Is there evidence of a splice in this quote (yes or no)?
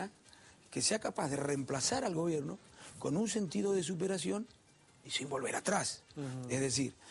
no